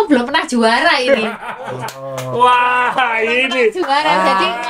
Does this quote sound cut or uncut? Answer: uncut